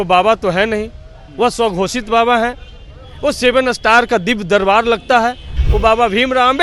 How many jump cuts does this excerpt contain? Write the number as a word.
one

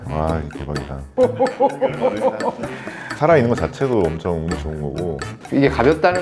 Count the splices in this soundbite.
one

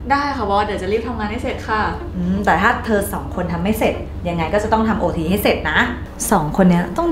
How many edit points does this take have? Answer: one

